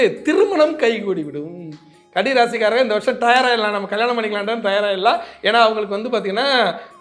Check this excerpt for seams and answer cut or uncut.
uncut